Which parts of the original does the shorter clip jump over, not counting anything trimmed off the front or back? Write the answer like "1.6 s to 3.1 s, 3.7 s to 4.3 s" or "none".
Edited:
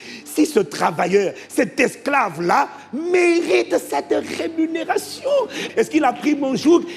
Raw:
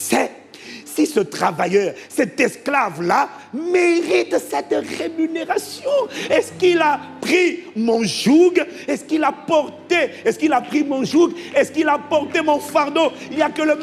6.2 s to 10.1 s